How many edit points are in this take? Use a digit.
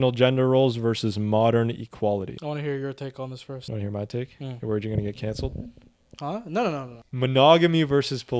3